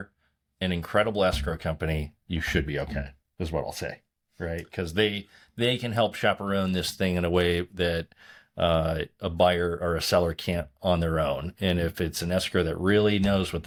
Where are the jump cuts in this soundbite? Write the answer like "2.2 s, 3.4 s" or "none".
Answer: none